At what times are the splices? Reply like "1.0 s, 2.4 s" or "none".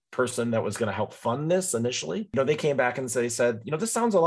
2.3 s